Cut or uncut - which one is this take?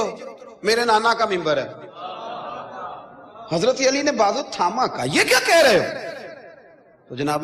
cut